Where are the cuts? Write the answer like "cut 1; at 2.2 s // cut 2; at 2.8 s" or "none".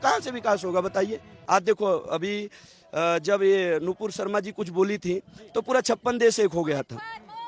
cut 1; at 1.3 s